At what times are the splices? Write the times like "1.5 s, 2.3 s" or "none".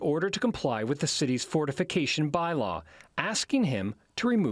none